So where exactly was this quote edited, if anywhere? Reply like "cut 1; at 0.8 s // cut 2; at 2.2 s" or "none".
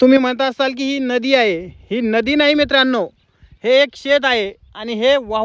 none